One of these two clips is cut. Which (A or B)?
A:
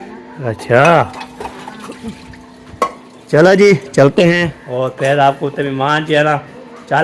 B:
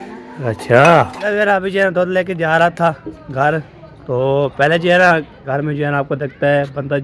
B